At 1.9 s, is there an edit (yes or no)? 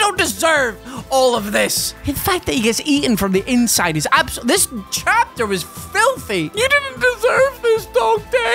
no